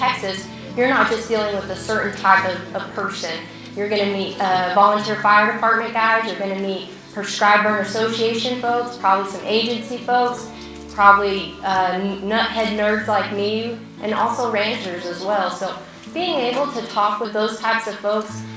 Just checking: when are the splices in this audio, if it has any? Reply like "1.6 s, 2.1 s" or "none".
13.8 s, 17.3 s